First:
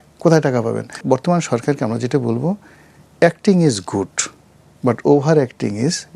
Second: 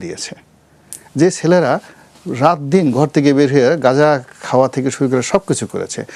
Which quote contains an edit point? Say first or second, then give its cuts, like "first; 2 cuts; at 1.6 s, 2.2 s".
first; 1 cut; at 1.0 s